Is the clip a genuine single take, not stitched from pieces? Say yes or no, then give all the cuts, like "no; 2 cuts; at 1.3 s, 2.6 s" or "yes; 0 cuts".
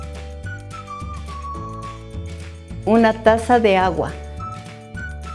no; 2 cuts; at 2.3 s, 4.1 s